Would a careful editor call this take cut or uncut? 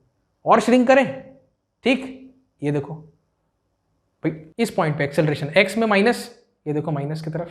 cut